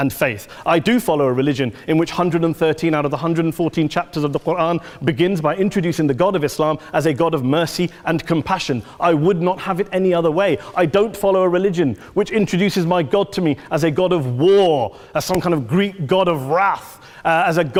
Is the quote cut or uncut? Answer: uncut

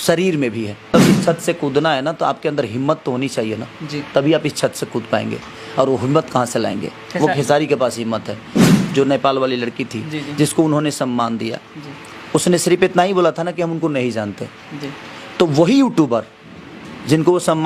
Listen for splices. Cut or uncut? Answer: cut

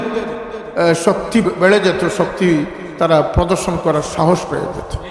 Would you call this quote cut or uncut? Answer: cut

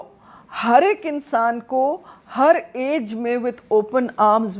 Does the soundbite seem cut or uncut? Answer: uncut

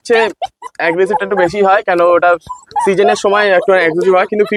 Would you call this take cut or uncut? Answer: uncut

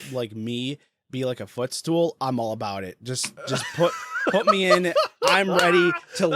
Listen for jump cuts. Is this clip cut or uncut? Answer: uncut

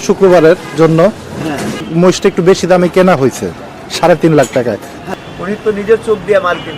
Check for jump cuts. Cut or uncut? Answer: cut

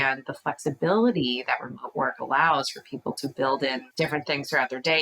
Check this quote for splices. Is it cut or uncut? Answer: cut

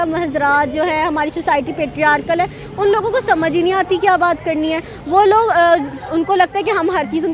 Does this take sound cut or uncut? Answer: uncut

